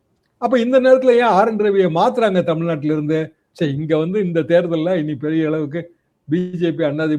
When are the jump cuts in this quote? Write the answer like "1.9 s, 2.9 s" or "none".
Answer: 3.4 s